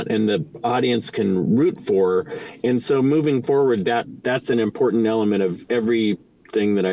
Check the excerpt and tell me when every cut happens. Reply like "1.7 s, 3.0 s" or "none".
4.1 s, 5.6 s